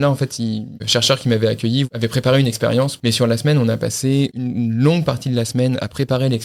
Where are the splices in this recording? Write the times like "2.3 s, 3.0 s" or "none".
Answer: 0.8 s, 1.9 s, 2.9 s, 4.4 s